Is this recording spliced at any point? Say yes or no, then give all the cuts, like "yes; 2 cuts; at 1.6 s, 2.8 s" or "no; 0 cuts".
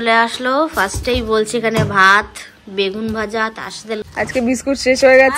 yes; 1 cut; at 4.0 s